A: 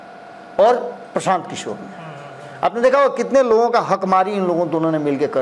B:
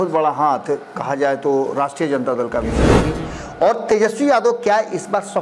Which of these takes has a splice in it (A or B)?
B